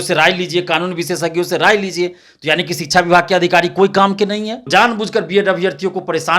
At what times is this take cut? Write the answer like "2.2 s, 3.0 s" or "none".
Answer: 4.7 s